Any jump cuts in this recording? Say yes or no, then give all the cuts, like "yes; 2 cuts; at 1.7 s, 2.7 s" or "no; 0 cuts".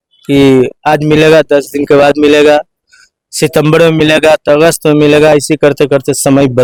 no; 0 cuts